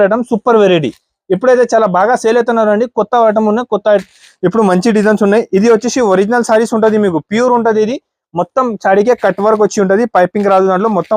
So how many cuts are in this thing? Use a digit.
0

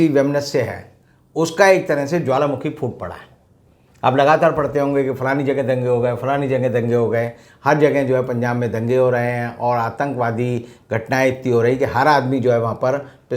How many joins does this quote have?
0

